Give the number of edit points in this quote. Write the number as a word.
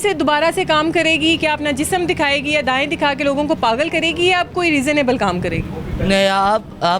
zero